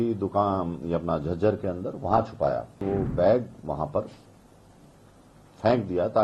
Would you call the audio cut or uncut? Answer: cut